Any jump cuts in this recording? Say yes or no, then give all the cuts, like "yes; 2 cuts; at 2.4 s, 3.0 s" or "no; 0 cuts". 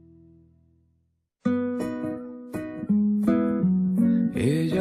yes; 1 cut; at 1.2 s